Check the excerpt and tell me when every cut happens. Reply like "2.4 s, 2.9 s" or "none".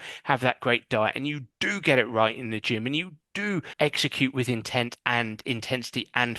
3.7 s